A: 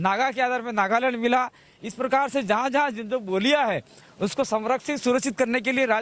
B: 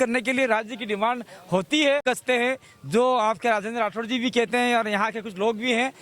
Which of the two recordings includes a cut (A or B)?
B